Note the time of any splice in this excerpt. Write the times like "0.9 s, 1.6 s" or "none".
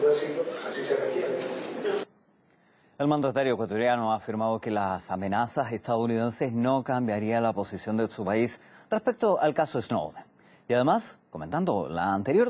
9.3 s